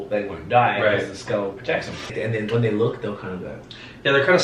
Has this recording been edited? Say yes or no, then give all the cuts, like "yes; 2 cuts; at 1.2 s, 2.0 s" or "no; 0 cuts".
yes; 1 cut; at 2.1 s